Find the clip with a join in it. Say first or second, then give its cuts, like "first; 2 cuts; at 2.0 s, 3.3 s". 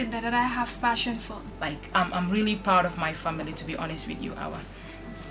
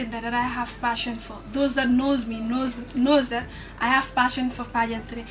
first; 1 cut; at 1.3 s